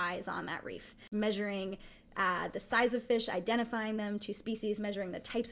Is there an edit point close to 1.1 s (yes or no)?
yes